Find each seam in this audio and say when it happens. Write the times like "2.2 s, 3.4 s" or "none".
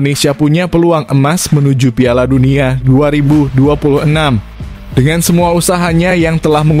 none